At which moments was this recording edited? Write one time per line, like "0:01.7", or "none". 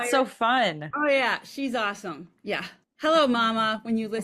0:02.8